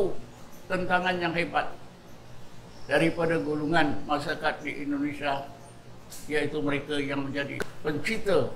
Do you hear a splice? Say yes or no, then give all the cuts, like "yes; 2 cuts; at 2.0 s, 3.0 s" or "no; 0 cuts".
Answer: yes; 1 cut; at 7.6 s